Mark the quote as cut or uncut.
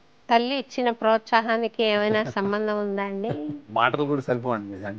cut